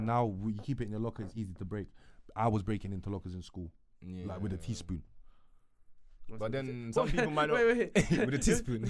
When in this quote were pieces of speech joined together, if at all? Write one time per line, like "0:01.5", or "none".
none